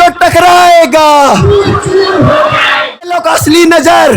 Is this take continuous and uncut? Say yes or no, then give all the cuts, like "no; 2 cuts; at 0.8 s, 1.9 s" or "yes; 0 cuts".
no; 1 cut; at 3.2 s